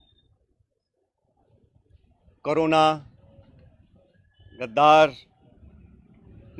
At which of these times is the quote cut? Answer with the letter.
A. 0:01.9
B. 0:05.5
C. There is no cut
C